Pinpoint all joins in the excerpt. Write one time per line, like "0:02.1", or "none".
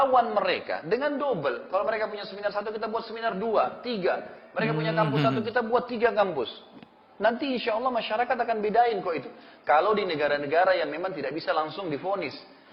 none